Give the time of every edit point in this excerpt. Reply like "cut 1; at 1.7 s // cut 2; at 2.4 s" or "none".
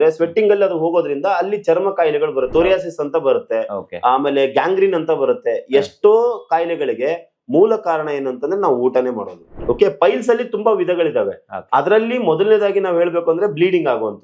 cut 1; at 2.5 s // cut 2; at 9.5 s